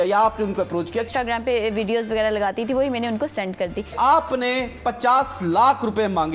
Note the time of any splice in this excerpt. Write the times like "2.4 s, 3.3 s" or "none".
1.1 s, 3.9 s